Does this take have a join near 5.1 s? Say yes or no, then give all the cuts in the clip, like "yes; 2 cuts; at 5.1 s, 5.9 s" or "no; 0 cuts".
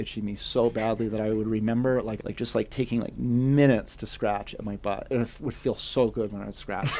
yes; 2 cuts; at 2.2 s, 5.1 s